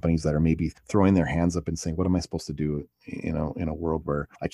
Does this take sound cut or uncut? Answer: uncut